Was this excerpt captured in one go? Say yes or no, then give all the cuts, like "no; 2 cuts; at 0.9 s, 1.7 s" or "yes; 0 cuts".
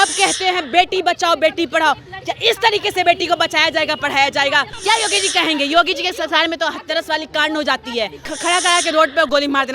no; 2 cuts; at 4.7 s, 8.3 s